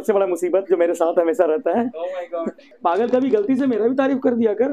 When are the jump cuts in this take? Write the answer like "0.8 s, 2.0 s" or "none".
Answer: 2.6 s